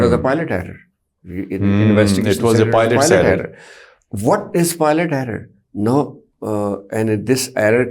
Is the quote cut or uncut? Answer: uncut